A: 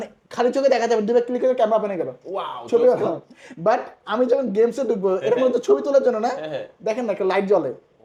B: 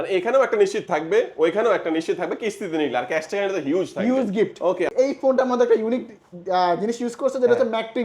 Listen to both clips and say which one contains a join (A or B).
B